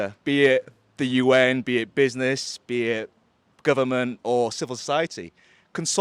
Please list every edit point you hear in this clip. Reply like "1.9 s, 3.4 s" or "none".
none